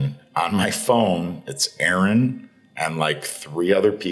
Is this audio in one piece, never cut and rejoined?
yes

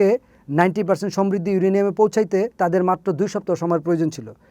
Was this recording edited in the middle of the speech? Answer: yes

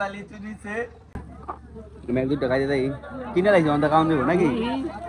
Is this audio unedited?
no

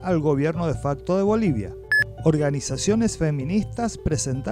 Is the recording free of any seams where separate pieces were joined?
no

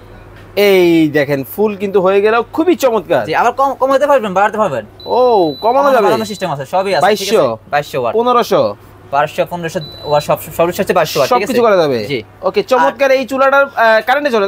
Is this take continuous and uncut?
yes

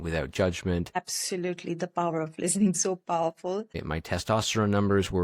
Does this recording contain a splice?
yes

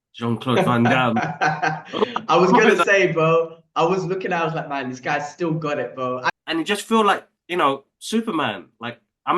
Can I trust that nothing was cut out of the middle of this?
no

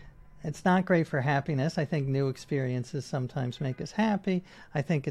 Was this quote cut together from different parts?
no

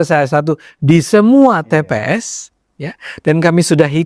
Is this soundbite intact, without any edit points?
yes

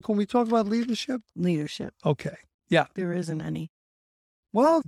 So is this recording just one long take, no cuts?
no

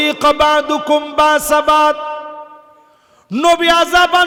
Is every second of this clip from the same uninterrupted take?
yes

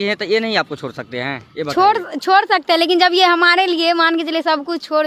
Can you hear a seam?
no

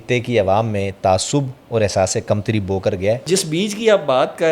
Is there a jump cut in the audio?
yes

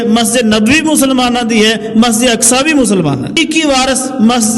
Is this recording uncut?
no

